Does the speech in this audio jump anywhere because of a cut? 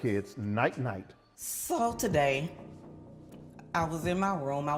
no; 0 cuts

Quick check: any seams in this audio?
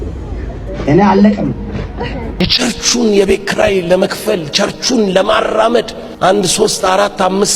yes; 2 cuts; at 2.5 s, 6.0 s

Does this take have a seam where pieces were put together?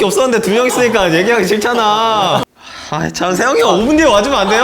yes; 1 cut; at 2.4 s

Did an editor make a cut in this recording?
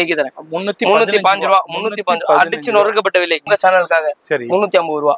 yes; 1 cut; at 3.4 s

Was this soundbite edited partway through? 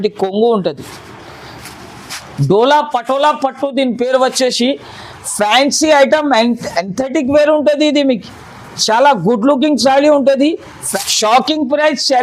yes; 1 cut; at 10.9 s

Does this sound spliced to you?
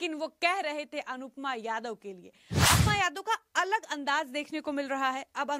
yes; 1 cut; at 2.8 s

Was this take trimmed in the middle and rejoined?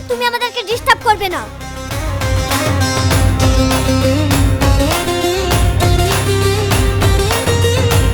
no; 0 cuts

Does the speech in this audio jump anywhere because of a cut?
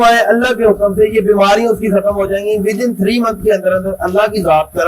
no; 0 cuts

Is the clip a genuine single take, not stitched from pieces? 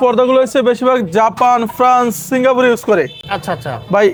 yes; 0 cuts

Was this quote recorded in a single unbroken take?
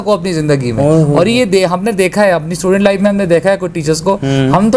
yes; 0 cuts

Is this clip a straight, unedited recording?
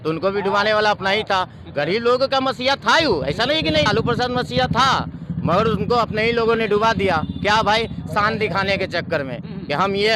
yes; 0 cuts

